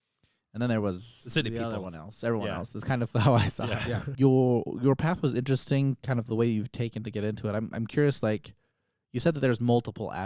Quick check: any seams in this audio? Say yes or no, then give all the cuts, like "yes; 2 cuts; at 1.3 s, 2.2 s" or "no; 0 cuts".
no; 0 cuts